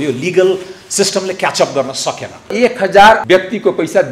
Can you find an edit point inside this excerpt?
yes; 2 cuts; at 2.5 s, 3.2 s

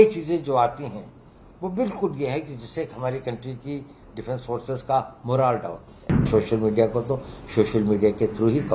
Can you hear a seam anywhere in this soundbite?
yes; 1 cut; at 6.3 s

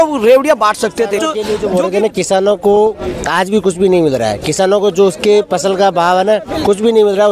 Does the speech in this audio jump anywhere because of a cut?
yes; 1 cut; at 1.3 s

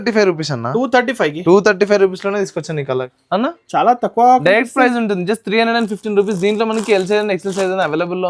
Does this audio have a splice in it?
yes; 1 cut; at 3.1 s

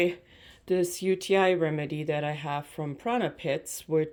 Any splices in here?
no; 0 cuts

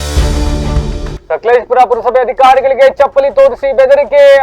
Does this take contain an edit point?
yes; 1 cut; at 1.1 s

